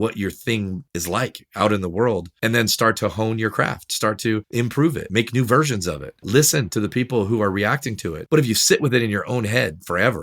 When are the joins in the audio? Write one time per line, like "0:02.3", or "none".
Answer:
0:02.8
0:04.9
0:08.2